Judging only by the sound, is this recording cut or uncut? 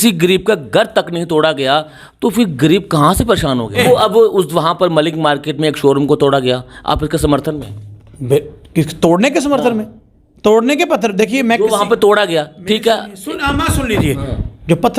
cut